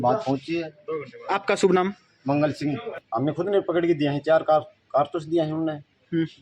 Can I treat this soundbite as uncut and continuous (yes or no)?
no